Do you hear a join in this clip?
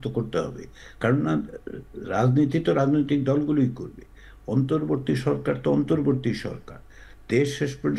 no; 0 cuts

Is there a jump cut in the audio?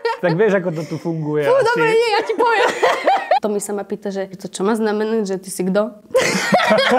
yes; 2 cuts; at 3.4 s, 4.5 s

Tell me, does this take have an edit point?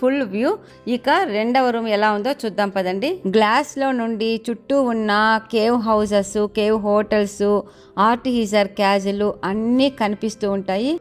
yes; 1 cut; at 3.2 s

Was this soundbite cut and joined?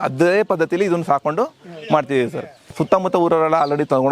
yes; 1 cut; at 2.7 s

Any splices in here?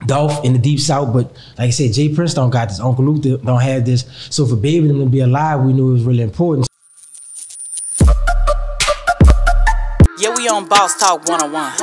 yes; 1 cut; at 6.7 s

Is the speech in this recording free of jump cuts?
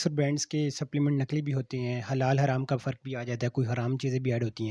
yes; 0 cuts

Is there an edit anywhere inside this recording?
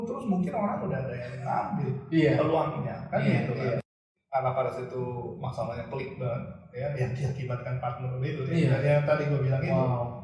yes; 1 cut; at 4.1 s

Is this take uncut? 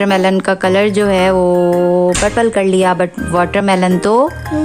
yes; 0 cuts

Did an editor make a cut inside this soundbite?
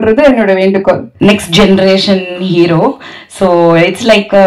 yes; 1 cut; at 1.1 s

